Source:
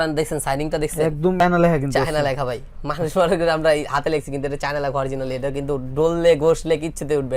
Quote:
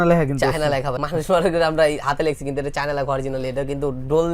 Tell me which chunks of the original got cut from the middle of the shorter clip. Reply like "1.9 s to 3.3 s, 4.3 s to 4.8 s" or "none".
2.5 s to 2.8 s